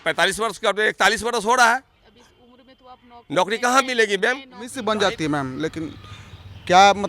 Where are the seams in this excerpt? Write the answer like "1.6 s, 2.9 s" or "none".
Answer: 4.8 s